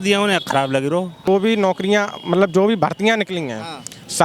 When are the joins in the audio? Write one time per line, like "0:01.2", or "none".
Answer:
0:01.3